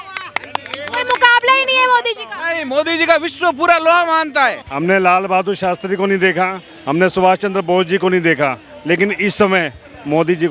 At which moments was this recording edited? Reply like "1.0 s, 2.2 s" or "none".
none